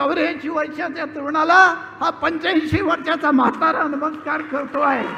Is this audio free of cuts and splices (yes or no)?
yes